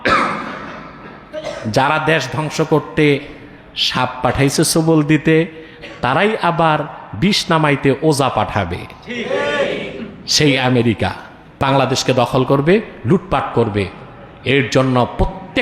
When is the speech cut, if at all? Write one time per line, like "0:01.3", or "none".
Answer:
0:11.5